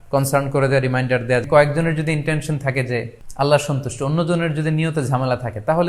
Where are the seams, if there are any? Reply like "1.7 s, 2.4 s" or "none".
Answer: 1.5 s, 3.2 s